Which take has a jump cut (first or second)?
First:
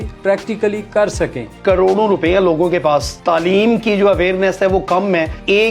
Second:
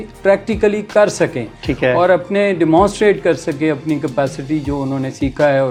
first